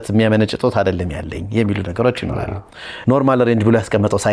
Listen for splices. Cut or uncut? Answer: cut